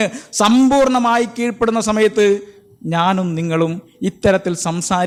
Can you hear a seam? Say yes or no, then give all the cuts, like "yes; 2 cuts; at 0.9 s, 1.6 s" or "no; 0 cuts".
no; 0 cuts